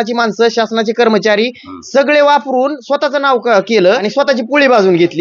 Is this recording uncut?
no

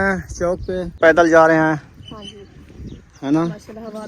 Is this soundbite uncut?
no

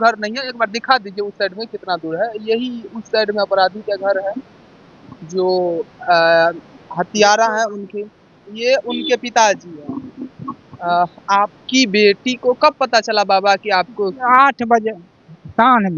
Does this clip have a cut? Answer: no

